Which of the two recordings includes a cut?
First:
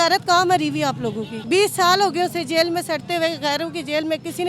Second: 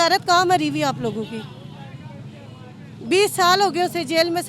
first; 1 cut; at 1.3 s

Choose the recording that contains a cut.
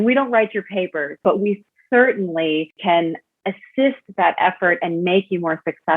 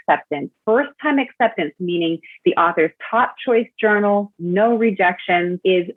first; 2 cuts; at 1.2 s, 2.8 s

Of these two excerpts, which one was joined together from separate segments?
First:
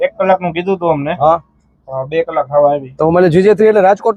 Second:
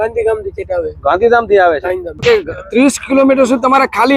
second; 1 cut; at 2.2 s

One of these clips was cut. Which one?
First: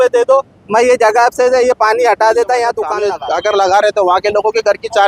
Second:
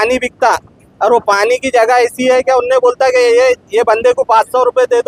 first; 1 cut; at 3.1 s

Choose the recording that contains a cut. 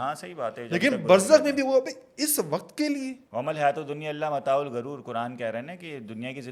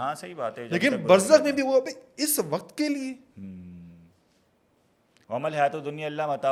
first; 1 cut; at 3.2 s

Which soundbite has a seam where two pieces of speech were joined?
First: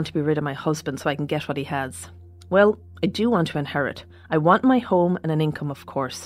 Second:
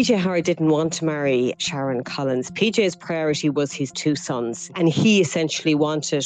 second; 2 cuts; at 1.6 s, 4.7 s

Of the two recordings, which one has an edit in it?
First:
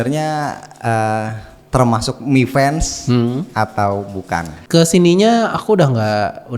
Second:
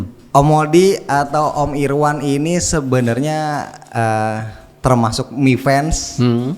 first; 1 cut; at 4.5 s

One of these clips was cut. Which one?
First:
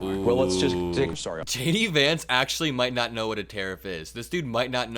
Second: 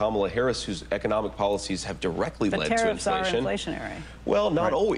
first; 1 cut; at 1.1 s

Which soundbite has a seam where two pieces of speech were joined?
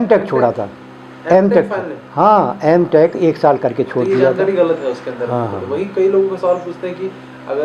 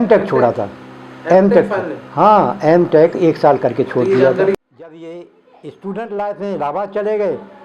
second; 1 cut; at 4.5 s

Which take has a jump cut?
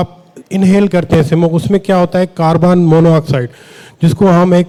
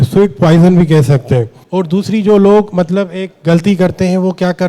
second; 1 cut; at 1.6 s

